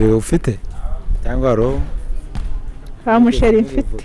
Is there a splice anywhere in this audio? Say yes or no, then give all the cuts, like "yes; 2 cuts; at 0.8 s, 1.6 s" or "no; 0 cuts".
no; 0 cuts